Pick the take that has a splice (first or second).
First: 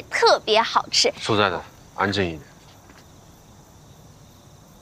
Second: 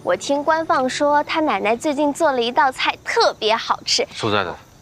first